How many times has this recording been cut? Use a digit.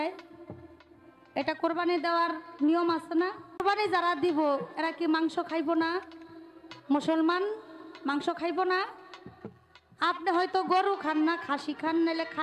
1